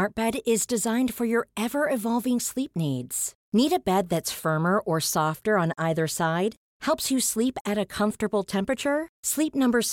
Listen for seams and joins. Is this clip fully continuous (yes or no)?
yes